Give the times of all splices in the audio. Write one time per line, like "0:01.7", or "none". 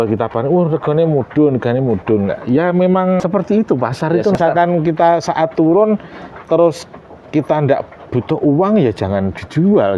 0:03.2
0:04.4

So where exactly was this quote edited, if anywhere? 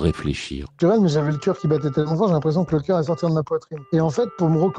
0:00.8
0:03.8

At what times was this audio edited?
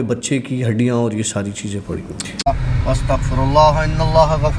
0:02.4

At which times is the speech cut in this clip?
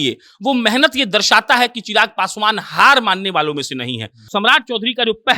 0:04.3

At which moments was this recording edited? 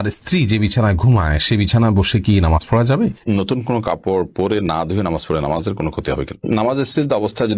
0:03.2
0:06.4

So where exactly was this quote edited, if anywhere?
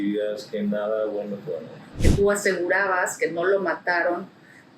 0:01.9

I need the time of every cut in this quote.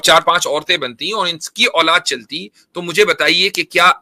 none

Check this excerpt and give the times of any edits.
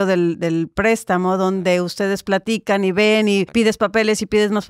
0:03.5

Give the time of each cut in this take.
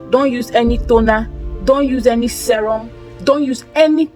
none

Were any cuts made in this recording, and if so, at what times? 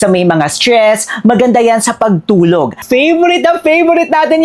0:02.8

